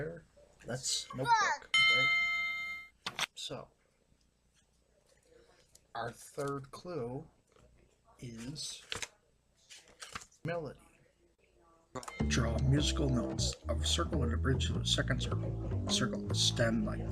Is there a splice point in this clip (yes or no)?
no